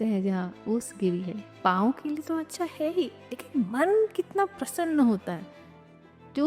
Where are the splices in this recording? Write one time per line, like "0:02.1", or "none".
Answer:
0:01.5